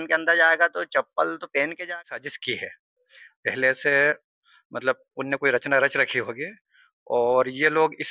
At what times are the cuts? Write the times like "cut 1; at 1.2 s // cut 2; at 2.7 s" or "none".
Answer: cut 1; at 2.0 s